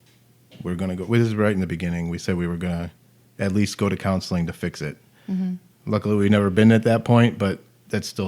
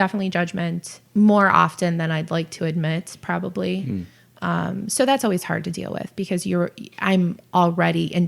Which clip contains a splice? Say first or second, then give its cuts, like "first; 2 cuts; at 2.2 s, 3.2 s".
second; 1 cut; at 1.0 s